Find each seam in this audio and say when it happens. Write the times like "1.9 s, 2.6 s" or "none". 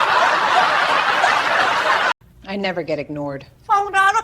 2.3 s

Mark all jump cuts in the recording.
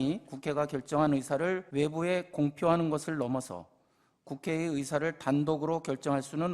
1.6 s

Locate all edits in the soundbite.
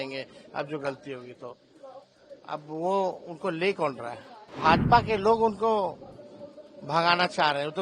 4.5 s

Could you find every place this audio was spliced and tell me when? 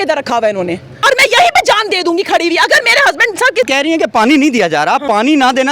1.0 s, 3.7 s

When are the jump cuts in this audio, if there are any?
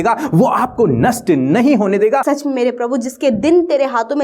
2.2 s

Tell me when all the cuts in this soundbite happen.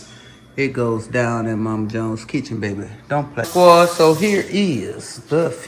3.5 s

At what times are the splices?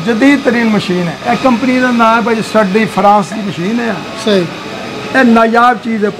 1.1 s

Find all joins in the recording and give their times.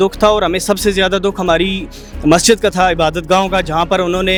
none

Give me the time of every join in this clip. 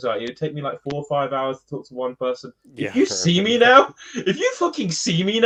none

